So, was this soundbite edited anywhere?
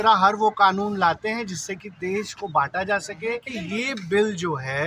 yes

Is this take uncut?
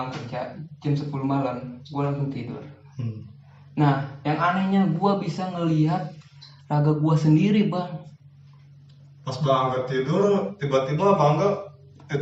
yes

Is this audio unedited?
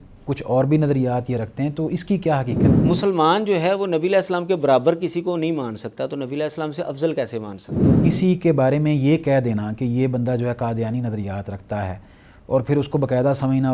no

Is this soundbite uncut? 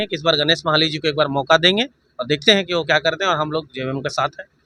yes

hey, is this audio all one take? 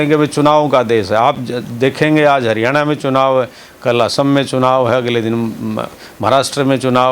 yes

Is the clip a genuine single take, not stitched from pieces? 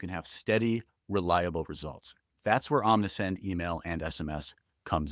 yes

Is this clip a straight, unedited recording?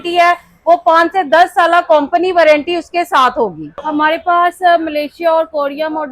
no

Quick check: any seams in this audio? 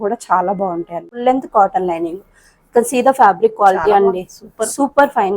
yes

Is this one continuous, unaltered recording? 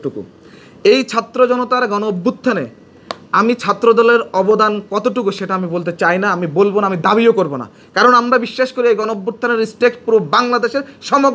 yes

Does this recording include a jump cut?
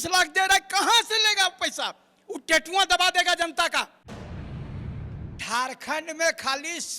yes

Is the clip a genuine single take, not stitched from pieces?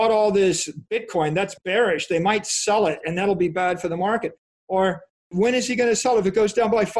no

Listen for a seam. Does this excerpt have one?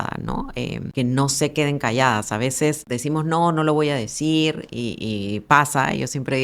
yes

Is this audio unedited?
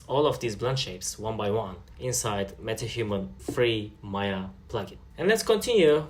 yes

